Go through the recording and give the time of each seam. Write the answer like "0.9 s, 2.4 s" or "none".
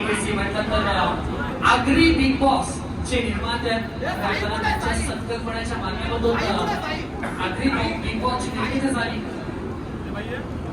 none